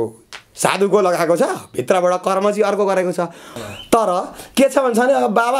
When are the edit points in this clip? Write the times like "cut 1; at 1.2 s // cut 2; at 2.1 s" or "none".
cut 1; at 3.5 s